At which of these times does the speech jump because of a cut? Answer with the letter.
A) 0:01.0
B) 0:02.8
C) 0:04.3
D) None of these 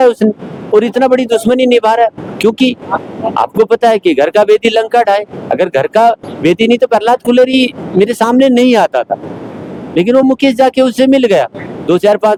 D